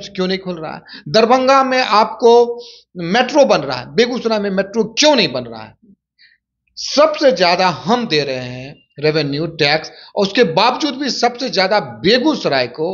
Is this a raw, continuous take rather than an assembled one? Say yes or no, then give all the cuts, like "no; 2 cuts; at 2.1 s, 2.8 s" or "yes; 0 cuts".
yes; 0 cuts